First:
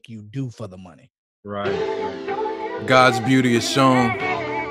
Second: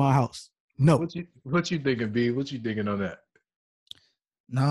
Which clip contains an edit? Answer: first; 1 cut; at 1.7 s

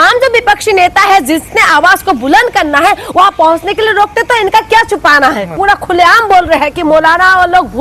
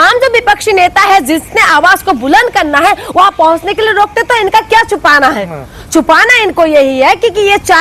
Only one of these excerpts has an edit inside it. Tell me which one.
first; 1 cut; at 5.6 s

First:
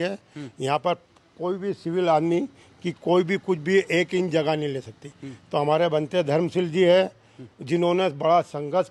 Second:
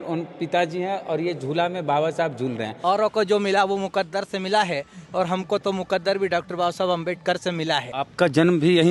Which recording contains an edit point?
second; 2 cuts; at 2.7 s, 7.9 s

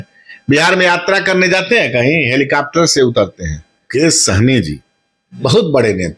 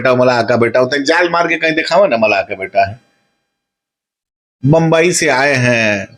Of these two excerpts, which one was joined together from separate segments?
first; 1 cut; at 3.9 s

